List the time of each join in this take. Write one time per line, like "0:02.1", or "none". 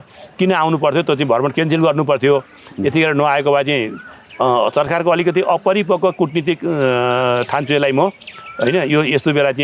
none